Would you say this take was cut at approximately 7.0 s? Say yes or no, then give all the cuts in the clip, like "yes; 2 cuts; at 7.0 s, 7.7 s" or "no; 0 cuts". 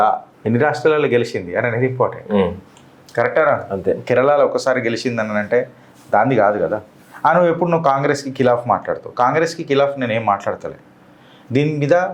no; 0 cuts